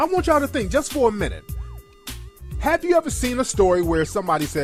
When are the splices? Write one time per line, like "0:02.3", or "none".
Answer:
none